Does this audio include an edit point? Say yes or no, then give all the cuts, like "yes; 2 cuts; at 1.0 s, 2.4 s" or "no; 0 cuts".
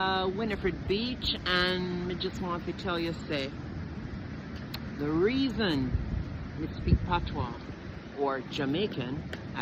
no; 0 cuts